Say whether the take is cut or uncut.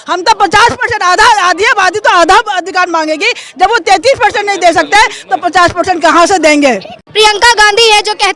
uncut